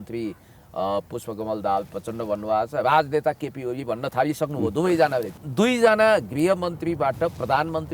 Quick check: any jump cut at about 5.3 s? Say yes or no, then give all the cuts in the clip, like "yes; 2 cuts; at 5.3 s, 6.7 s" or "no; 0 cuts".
yes; 1 cut; at 5.3 s